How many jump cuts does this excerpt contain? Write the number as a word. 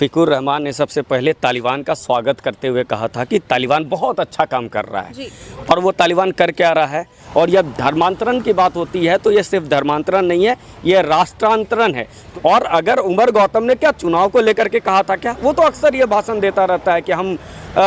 two